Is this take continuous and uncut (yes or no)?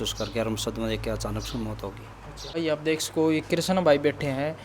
no